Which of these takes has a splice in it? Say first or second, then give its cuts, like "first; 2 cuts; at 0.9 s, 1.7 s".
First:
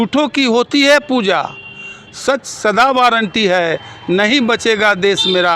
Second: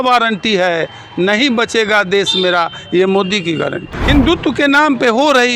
second; 1 cut; at 3.9 s